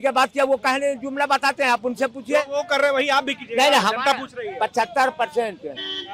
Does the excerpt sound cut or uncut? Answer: uncut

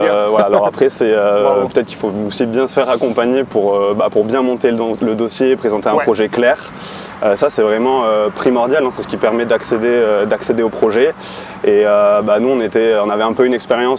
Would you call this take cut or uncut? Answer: uncut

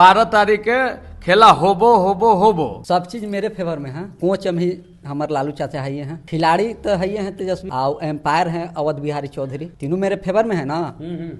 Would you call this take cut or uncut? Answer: cut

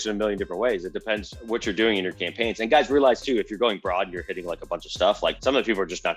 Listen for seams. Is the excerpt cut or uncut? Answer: cut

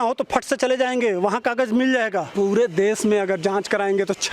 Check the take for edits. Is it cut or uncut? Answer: cut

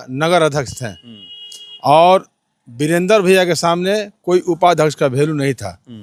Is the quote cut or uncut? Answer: uncut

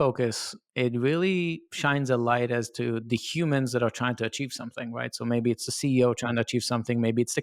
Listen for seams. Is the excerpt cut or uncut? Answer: uncut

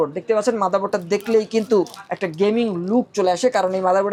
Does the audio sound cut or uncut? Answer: uncut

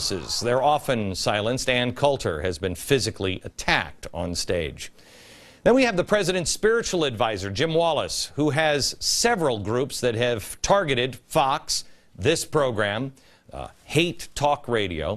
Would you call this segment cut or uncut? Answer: cut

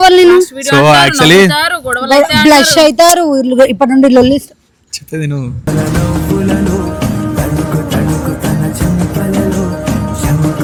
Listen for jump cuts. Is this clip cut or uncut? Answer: uncut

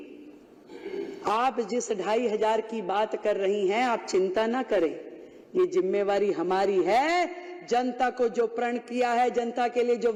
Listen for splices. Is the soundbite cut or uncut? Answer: uncut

